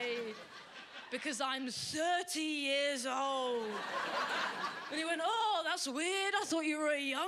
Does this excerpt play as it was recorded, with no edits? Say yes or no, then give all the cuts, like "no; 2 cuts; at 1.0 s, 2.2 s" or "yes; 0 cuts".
yes; 0 cuts